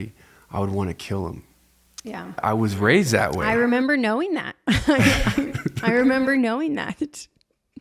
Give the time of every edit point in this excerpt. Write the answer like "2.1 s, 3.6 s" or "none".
2.4 s